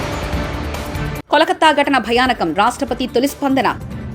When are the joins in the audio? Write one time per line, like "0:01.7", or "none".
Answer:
0:01.2